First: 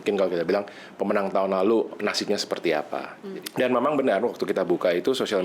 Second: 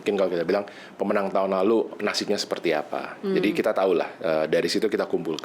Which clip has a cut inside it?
first; 1 cut; at 3.1 s

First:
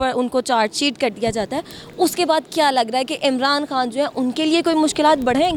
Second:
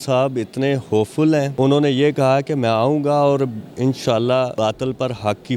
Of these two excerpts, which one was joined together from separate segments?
second; 2 cuts; at 1.5 s, 4.5 s

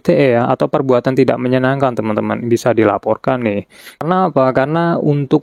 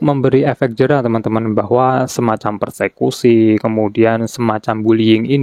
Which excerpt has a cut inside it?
first; 1 cut; at 3.9 s

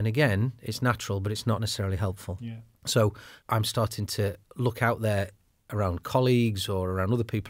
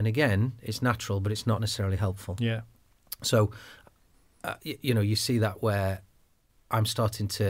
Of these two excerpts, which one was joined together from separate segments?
first; 2 cuts; at 2.3 s, 3.3 s

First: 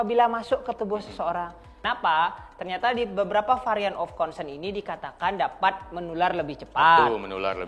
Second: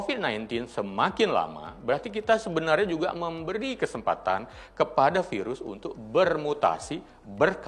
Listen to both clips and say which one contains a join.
first; 1 cut; at 1.7 s

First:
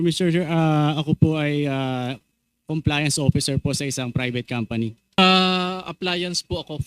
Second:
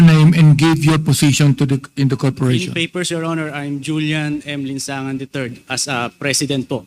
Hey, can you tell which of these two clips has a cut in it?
first; 1 cut; at 5.2 s

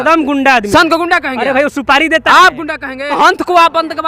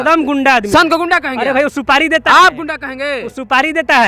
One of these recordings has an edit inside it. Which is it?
first; 1 cut; at 3.2 s

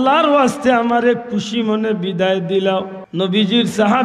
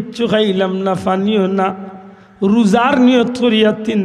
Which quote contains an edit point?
first; 1 cut; at 3.0 s

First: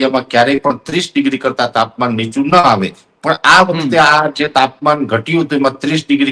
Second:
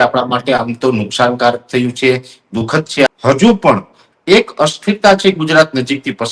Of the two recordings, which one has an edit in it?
second; 1 cut; at 3.1 s

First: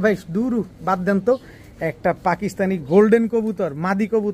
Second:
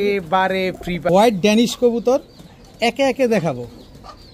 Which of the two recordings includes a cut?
second; 1 cut; at 1.1 s

